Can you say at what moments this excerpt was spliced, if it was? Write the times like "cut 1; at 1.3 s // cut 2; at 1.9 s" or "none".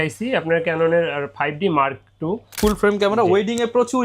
cut 1; at 2.6 s